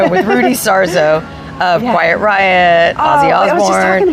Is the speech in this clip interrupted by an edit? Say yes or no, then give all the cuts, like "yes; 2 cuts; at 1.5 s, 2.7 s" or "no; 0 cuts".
no; 0 cuts